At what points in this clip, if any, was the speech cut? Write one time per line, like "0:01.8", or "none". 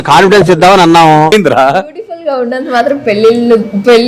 0:01.3